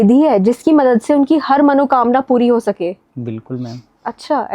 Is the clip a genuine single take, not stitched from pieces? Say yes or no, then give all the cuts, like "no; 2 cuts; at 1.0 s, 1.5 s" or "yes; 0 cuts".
yes; 0 cuts